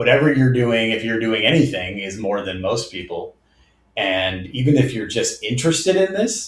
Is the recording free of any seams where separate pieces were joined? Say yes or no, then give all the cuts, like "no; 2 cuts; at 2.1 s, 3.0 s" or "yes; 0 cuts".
yes; 0 cuts